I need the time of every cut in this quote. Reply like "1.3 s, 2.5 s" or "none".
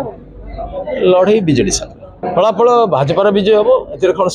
2.2 s